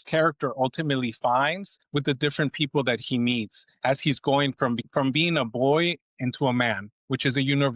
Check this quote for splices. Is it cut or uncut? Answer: cut